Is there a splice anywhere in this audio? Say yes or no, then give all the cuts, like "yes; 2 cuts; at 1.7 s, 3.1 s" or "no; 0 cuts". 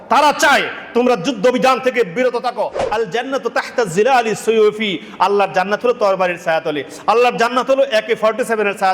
yes; 1 cut; at 2.8 s